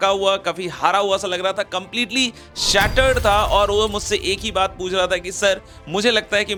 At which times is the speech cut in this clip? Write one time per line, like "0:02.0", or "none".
none